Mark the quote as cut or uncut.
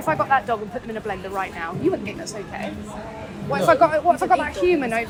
uncut